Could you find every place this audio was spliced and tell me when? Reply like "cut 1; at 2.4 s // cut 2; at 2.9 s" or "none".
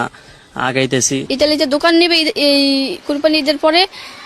cut 1; at 1.2 s